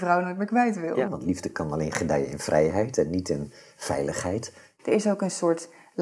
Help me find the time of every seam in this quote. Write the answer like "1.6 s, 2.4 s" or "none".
1.1 s, 4.7 s